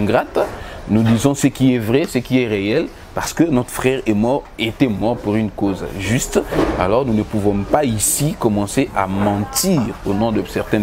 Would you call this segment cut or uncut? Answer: uncut